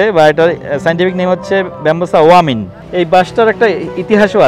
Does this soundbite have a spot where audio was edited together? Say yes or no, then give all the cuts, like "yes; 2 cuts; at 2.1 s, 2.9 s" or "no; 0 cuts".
yes; 1 cut; at 2.7 s